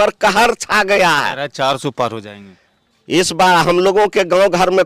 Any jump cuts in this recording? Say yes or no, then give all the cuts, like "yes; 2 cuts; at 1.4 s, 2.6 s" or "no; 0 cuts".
no; 0 cuts